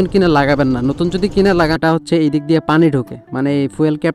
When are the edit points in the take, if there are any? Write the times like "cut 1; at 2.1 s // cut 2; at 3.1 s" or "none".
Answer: cut 1; at 1.8 s